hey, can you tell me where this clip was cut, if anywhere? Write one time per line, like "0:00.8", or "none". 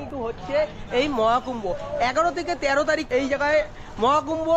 none